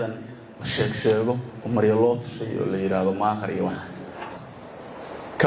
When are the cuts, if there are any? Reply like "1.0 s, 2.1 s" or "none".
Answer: 4.4 s